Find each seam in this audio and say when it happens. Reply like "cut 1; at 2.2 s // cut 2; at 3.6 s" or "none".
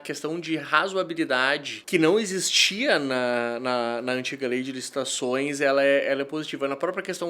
cut 1; at 1.7 s